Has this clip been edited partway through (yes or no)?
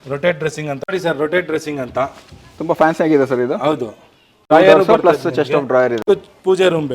yes